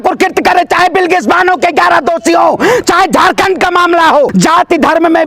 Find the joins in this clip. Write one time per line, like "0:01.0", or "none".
0:04.3